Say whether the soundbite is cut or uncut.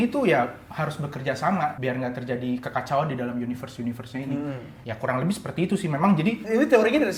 uncut